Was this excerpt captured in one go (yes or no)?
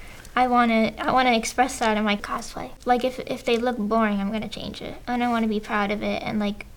no